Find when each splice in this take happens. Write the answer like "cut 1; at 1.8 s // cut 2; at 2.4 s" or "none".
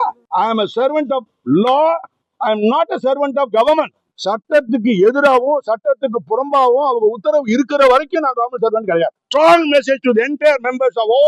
cut 1; at 9.2 s